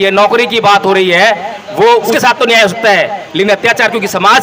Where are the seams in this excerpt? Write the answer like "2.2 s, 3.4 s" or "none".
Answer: 2.1 s